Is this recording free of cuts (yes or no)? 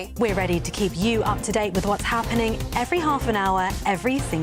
yes